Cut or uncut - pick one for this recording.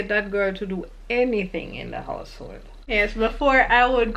cut